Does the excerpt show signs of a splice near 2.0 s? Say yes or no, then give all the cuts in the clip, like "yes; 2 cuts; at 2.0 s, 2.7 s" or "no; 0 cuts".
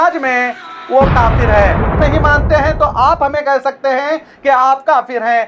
yes; 1 cut; at 2.0 s